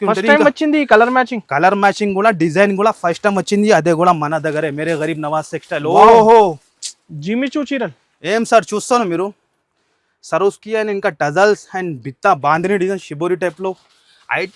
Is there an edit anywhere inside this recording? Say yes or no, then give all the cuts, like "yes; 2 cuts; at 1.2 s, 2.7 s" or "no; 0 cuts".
no; 0 cuts